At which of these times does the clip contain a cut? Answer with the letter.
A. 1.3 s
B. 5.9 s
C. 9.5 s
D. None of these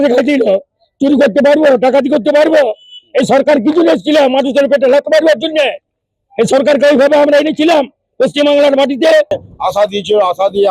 C